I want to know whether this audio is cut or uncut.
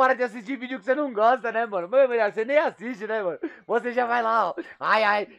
uncut